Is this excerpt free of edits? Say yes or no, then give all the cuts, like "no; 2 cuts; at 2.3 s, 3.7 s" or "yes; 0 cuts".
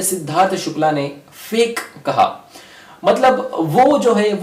yes; 0 cuts